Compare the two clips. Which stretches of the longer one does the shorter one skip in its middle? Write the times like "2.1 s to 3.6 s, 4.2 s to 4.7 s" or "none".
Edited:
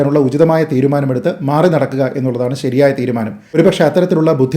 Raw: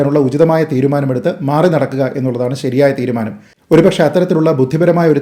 3.6 s to 3.8 s